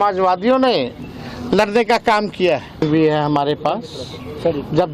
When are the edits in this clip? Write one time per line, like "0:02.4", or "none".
0:02.8